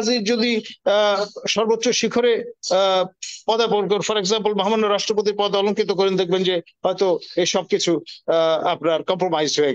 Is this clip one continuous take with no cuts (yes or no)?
yes